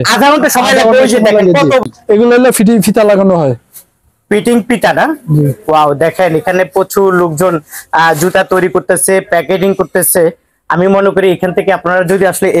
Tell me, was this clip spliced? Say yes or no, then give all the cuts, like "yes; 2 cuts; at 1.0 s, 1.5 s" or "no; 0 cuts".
yes; 1 cut; at 1.8 s